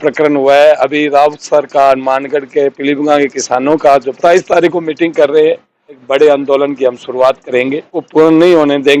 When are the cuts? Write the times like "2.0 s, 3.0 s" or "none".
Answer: 4.2 s, 6.0 s, 8.0 s